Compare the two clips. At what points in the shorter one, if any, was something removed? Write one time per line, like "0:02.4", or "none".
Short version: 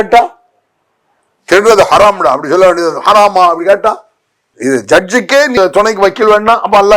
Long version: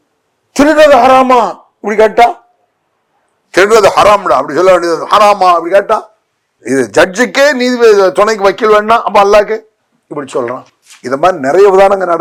0:05.6